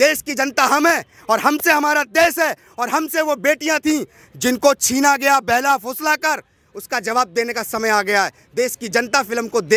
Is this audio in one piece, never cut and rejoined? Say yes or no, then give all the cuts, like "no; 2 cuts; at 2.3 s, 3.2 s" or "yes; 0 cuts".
yes; 0 cuts